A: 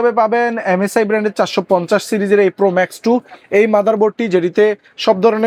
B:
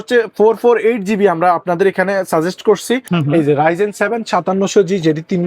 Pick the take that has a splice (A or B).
B